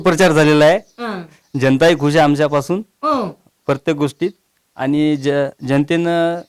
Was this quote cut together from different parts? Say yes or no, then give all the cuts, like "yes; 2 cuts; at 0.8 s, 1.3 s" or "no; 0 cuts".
no; 0 cuts